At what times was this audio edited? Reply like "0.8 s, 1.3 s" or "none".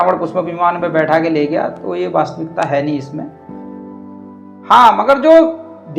none